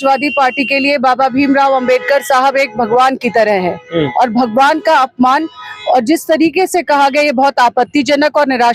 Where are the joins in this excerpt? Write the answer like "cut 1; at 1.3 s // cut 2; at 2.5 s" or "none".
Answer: none